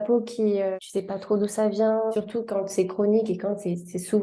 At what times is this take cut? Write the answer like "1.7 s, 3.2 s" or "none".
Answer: 0.8 s, 2.1 s